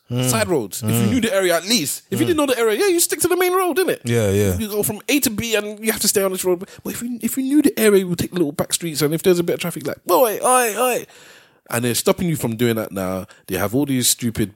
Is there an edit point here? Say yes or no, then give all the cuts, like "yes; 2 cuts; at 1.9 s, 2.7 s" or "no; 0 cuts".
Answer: no; 0 cuts